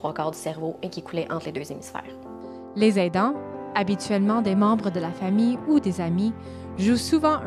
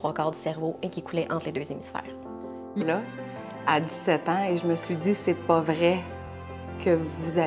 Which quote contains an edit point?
first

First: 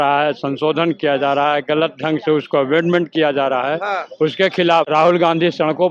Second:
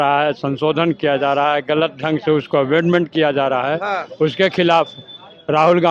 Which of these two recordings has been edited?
first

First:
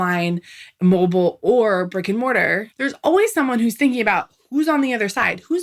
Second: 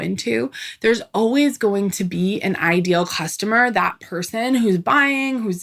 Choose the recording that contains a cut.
first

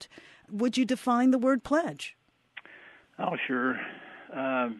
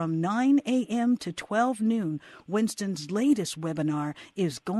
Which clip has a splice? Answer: first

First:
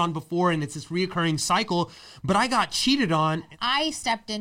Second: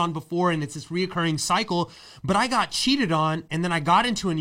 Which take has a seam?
first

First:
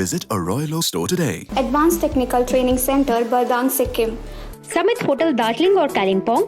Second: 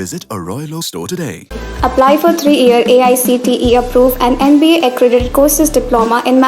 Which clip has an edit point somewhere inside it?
first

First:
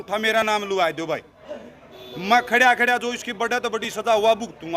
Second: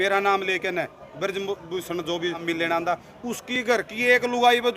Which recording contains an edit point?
second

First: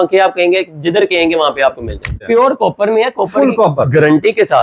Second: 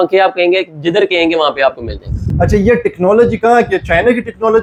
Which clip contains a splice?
first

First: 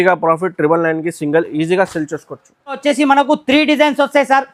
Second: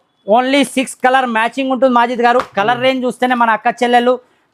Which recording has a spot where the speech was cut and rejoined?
first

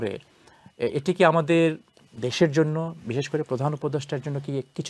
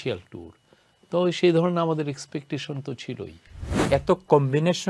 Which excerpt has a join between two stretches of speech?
second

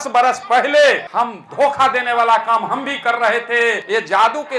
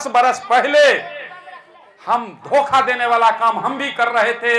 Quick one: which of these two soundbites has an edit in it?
first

